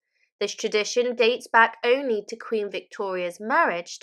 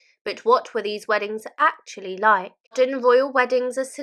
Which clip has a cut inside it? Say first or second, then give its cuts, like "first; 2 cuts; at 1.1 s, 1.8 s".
second; 1 cut; at 2.7 s